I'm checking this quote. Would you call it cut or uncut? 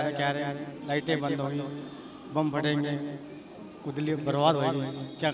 uncut